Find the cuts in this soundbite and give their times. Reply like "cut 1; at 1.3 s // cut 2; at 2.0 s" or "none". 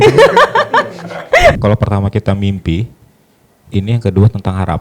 cut 1; at 1.5 s